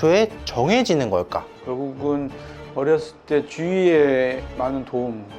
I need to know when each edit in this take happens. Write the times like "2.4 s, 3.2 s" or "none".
1.5 s